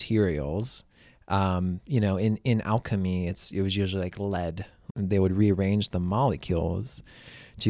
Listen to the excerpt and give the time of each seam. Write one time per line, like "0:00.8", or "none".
0:04.9